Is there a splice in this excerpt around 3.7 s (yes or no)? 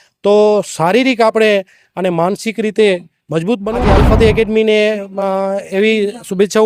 yes